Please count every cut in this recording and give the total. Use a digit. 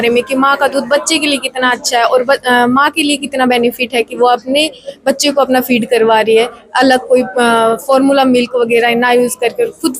0